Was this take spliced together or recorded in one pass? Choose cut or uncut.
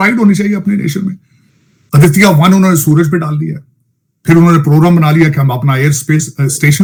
uncut